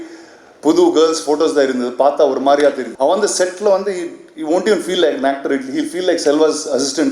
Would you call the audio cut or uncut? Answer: cut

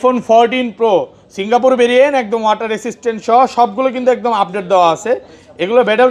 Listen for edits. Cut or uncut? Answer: uncut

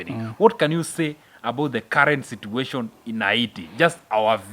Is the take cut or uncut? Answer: uncut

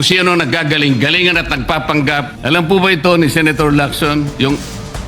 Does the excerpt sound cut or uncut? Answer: cut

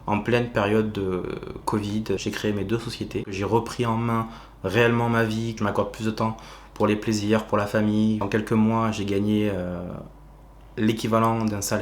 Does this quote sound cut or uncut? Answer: cut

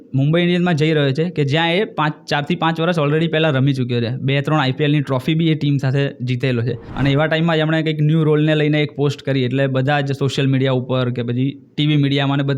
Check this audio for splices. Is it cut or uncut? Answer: cut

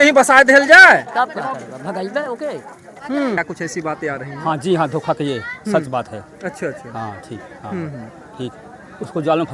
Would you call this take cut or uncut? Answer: cut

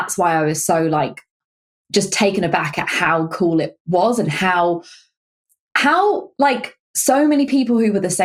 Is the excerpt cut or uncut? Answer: uncut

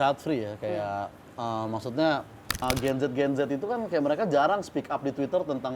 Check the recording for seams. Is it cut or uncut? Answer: cut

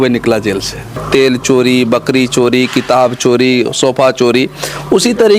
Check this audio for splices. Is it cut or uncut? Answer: cut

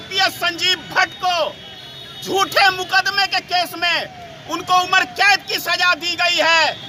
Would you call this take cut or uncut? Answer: uncut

